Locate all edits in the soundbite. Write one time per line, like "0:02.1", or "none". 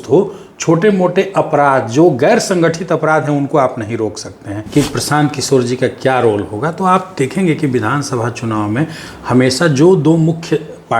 0:04.5